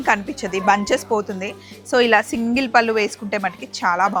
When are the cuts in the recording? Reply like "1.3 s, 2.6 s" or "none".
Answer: none